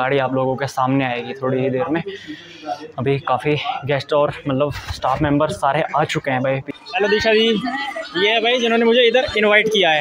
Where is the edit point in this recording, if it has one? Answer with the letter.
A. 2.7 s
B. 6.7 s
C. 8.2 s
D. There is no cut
B